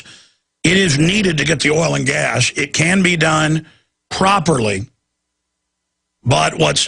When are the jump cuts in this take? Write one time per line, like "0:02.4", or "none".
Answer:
0:02.7